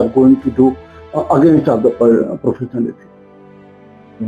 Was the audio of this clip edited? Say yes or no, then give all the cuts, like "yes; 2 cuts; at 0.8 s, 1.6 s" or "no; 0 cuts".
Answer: no; 0 cuts